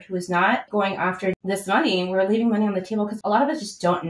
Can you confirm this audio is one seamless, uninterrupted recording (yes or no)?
no